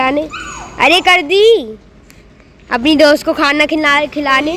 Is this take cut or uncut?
cut